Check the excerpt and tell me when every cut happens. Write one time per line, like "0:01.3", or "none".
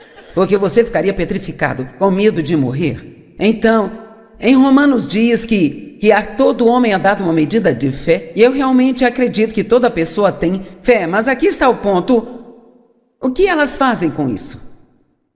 none